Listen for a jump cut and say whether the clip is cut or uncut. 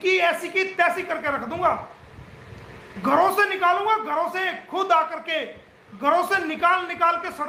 uncut